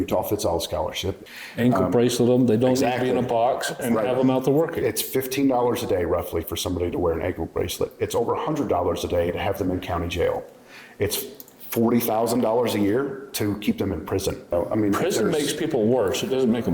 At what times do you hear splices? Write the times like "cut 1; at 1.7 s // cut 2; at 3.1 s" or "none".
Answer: cut 1; at 1.2 s // cut 2; at 14.5 s